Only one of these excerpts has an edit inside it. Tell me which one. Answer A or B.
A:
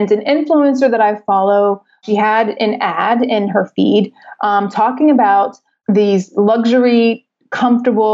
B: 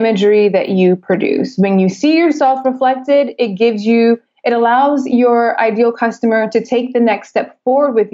A